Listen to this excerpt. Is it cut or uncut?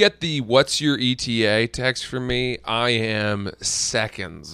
uncut